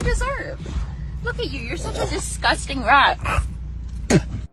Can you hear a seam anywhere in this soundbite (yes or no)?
no